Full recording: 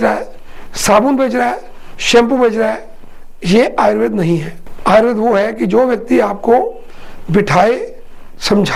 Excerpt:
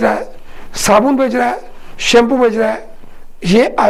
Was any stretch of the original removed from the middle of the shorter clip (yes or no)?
no